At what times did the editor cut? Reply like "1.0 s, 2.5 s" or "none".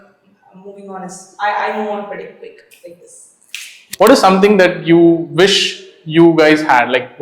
3.8 s